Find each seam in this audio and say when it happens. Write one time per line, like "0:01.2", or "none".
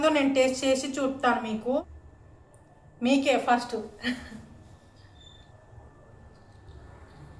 0:01.8
0:05.4